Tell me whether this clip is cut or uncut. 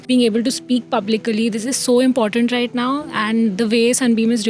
uncut